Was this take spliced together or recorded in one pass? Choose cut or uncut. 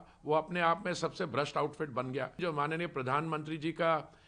cut